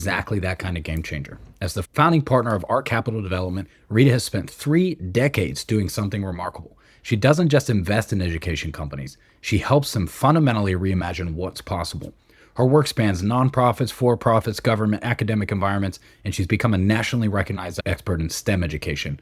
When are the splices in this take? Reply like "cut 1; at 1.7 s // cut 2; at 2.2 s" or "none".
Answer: cut 1; at 1.8 s // cut 2; at 17.7 s